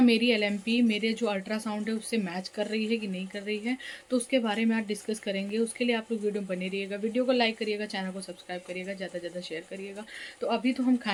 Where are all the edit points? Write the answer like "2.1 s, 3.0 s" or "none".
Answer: none